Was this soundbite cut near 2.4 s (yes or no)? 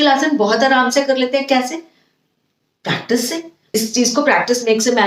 no